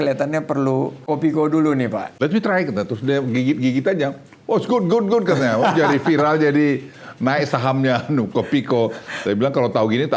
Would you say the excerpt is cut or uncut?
cut